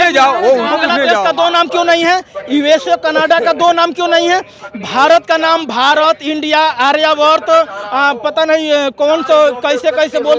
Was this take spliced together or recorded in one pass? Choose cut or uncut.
uncut